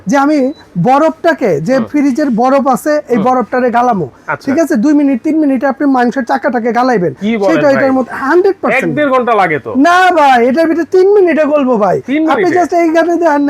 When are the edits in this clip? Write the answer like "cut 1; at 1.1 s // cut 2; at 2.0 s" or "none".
none